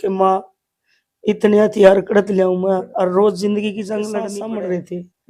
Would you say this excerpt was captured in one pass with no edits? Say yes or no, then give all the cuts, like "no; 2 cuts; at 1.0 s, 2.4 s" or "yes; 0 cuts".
no; 1 cut; at 4.3 s